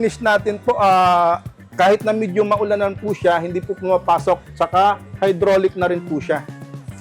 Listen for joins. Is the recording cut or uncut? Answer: uncut